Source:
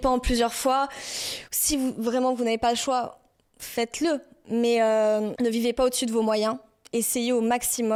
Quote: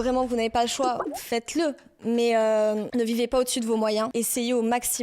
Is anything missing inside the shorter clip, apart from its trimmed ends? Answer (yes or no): yes